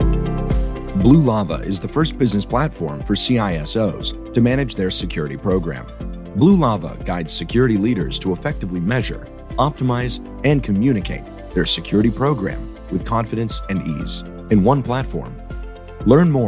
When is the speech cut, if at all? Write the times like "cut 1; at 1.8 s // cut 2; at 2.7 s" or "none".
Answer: cut 1; at 0.9 s